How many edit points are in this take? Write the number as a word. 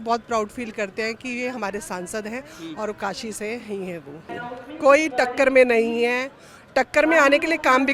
one